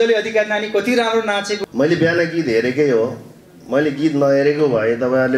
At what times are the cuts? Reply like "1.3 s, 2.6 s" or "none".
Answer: 1.6 s